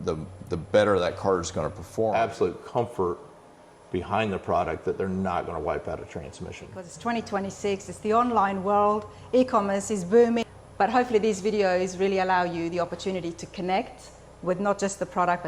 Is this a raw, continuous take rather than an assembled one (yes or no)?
no